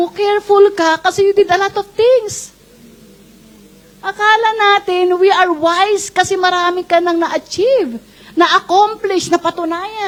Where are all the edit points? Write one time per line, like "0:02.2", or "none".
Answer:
none